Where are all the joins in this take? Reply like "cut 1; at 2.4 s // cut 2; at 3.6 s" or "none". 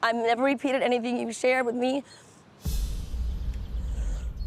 none